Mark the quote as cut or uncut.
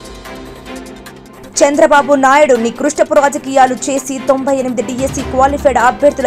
uncut